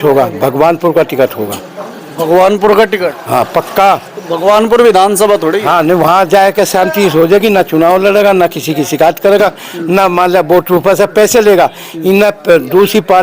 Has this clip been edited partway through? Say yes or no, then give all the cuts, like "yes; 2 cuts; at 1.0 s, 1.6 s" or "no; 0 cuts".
no; 0 cuts